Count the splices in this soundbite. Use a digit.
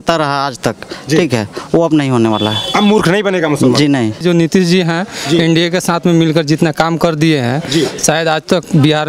1